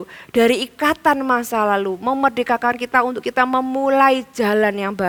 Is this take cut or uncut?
uncut